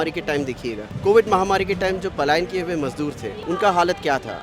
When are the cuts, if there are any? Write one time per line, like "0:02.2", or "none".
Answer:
0:00.9
0:03.3